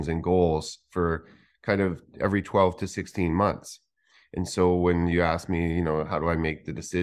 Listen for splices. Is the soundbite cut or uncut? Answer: uncut